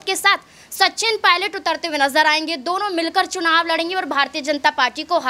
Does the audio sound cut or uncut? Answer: uncut